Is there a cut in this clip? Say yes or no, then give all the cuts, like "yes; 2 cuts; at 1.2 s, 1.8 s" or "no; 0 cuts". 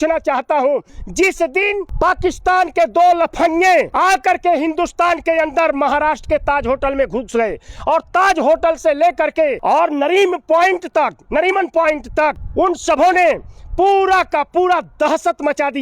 yes; 5 cuts; at 0.9 s, 1.9 s, 3.9 s, 9.6 s, 12.4 s